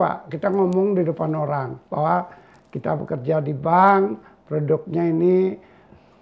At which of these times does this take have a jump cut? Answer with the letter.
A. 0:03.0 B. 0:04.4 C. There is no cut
C